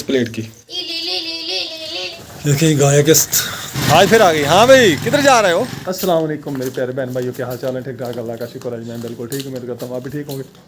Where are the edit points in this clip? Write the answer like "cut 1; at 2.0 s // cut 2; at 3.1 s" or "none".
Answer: cut 1; at 2.1 s // cut 2; at 3.8 s // cut 3; at 5.8 s

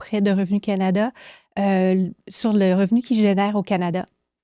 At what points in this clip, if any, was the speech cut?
none

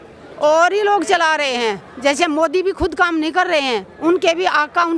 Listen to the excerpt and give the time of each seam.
none

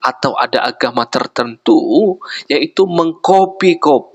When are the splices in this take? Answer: none

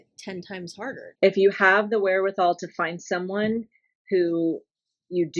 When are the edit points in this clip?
cut 1; at 1.1 s

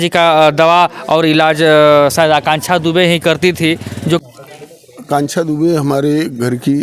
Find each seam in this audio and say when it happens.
cut 1; at 4.2 s

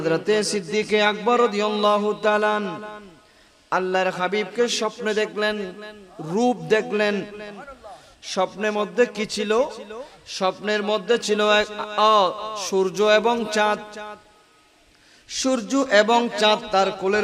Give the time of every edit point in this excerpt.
none

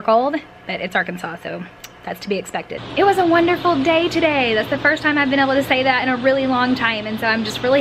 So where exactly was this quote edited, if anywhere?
cut 1; at 2.8 s

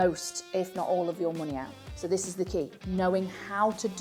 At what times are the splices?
none

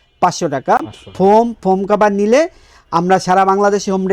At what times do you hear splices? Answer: none

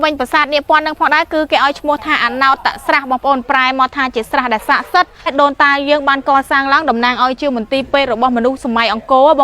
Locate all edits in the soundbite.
cut 1; at 5.3 s

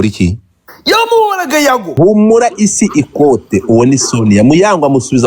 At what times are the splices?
cut 1; at 1.9 s

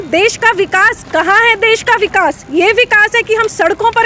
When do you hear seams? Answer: none

